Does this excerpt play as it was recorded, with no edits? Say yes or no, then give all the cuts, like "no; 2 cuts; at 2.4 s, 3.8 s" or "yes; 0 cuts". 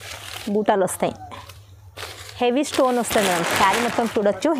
yes; 0 cuts